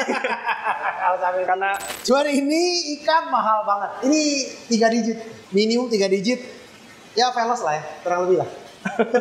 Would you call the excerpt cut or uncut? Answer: cut